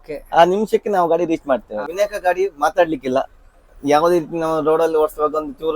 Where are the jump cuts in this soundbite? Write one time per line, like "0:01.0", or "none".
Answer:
0:01.8